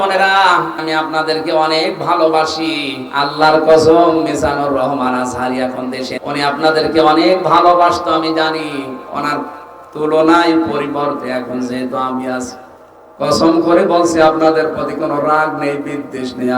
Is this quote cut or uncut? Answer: cut